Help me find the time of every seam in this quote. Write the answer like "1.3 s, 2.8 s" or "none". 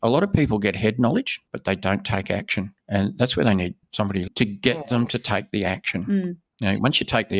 1.4 s, 2.8 s, 4.3 s, 6.4 s